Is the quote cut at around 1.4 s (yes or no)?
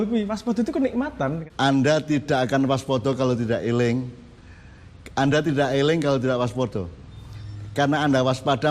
yes